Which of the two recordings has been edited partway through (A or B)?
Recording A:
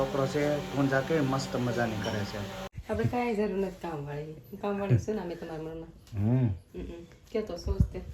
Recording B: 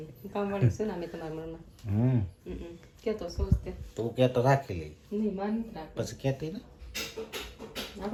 A